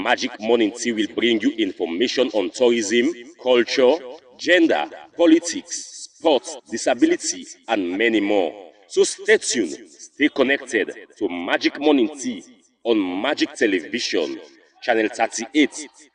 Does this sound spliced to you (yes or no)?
no